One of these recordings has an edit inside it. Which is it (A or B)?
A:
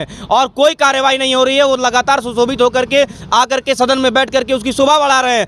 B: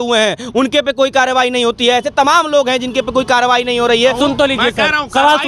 B